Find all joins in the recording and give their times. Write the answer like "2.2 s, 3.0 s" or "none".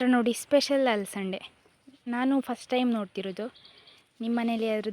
none